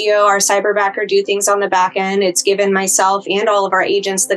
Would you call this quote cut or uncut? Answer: uncut